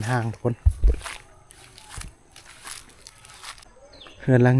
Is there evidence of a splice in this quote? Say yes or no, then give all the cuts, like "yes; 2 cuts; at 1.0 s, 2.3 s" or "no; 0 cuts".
yes; 1 cut; at 3.7 s